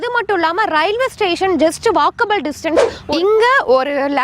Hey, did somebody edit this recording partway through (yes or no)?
yes